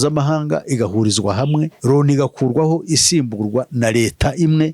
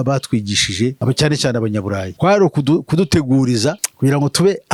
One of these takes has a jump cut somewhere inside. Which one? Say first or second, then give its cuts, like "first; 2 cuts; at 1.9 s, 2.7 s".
first; 1 cut; at 1.7 s